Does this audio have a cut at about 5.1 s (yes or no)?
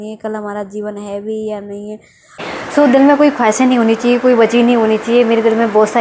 no